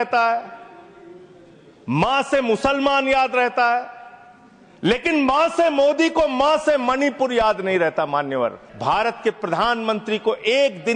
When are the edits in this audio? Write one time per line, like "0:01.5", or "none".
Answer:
0:08.7